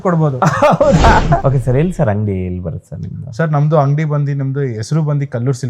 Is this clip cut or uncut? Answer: cut